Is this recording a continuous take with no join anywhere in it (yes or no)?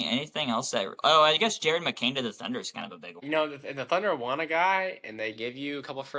no